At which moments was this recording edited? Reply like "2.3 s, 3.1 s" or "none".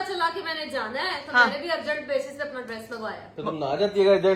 none